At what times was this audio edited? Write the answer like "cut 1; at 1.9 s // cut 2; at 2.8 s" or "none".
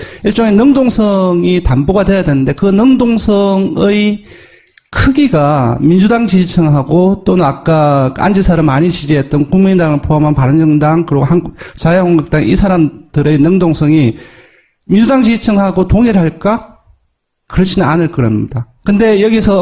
cut 1; at 13.3 s